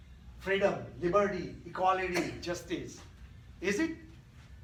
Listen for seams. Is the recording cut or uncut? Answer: uncut